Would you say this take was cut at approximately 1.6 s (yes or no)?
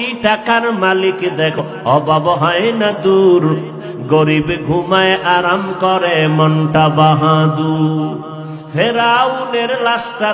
yes